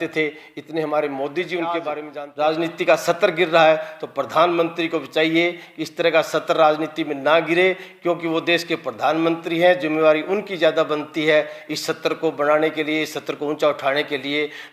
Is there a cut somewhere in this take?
yes; 1 cut; at 2.0 s

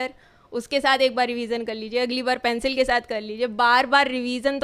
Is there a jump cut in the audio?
no; 0 cuts

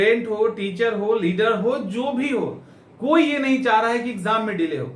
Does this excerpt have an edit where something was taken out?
no; 0 cuts

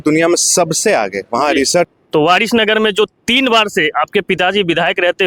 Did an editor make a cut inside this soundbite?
yes; 1 cut; at 1.9 s

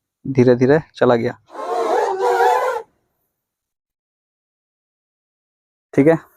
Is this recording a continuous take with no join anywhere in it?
no; 1 cut; at 1.6 s

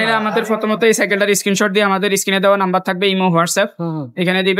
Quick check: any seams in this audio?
no; 0 cuts

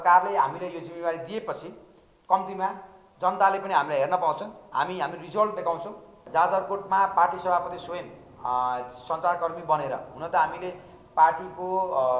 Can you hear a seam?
yes; 1 cut; at 6.2 s

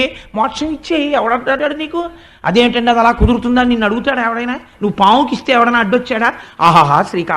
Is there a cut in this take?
yes; 1 cut; at 1.6 s

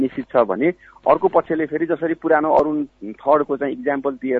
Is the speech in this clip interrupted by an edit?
no; 0 cuts

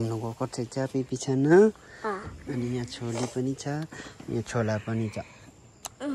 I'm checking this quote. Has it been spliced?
no; 0 cuts

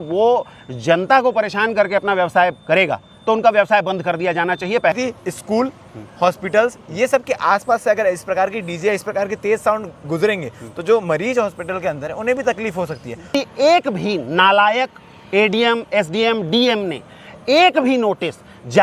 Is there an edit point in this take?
yes; 2 cuts; at 4.9 s, 13.3 s

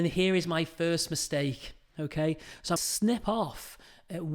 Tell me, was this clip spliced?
yes; 1 cut; at 2.8 s

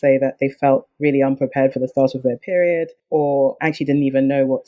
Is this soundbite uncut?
no; 1 cut; at 3.0 s

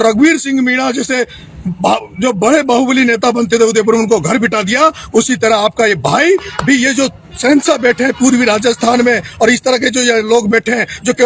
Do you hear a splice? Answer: no; 0 cuts

